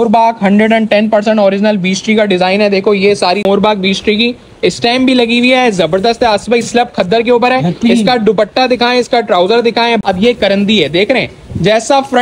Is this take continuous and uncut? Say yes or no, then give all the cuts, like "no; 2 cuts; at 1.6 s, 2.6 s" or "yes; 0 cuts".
no; 2 cuts; at 3.4 s, 10.0 s